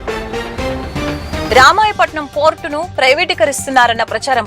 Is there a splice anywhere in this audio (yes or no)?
yes